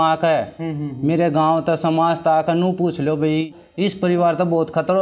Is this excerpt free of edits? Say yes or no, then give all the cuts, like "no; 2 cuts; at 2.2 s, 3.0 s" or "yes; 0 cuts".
no; 1 cut; at 3.5 s